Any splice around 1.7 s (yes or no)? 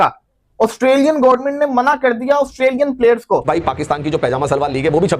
no